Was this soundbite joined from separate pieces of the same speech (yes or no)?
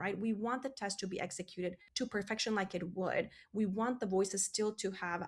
yes